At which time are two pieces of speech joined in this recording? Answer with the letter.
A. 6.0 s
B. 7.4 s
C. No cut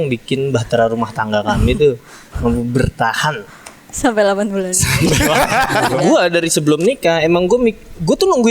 A